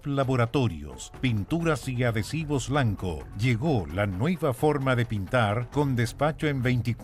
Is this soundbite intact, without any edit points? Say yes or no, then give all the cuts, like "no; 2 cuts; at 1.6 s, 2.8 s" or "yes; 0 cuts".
yes; 0 cuts